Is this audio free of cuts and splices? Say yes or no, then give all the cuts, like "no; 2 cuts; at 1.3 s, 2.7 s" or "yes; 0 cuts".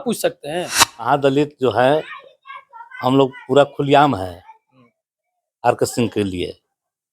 no; 1 cut; at 1.1 s